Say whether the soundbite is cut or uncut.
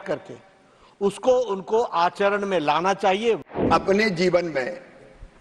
cut